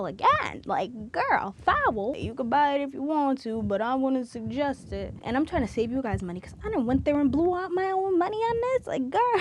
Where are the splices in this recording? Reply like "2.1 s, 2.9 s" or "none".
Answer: 2.2 s, 5.2 s